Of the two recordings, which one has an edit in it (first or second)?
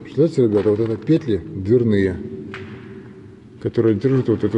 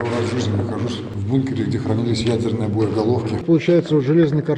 second